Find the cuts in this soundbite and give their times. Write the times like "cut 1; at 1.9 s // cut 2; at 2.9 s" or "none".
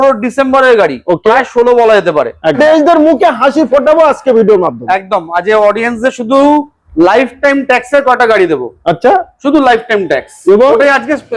cut 1; at 2.6 s